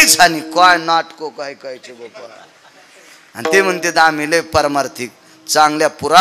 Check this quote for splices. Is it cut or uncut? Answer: uncut